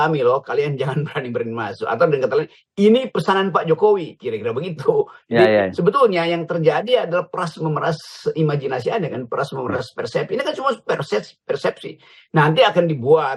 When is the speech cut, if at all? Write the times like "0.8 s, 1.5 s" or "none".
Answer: none